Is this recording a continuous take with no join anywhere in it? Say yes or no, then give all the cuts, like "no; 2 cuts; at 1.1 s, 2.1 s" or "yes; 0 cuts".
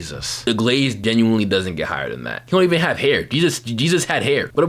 no; 1 cut; at 2.3 s